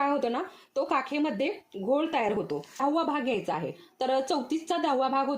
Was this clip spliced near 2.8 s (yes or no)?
yes